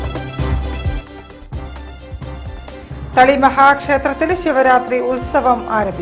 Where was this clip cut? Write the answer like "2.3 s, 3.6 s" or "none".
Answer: 1.0 s